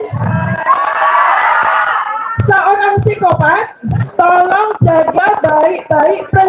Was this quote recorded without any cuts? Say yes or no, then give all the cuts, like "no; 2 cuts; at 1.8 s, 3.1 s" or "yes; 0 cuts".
no; 1 cut; at 4.0 s